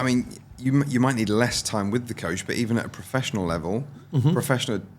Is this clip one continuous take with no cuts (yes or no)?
yes